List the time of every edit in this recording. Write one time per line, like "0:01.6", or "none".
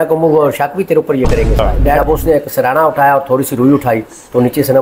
0:01.8